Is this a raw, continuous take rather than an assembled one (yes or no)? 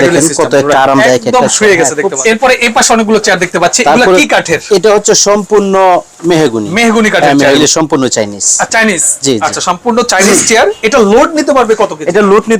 no